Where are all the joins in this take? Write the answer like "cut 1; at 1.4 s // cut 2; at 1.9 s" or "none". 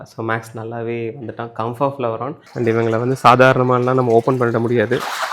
cut 1; at 2.4 s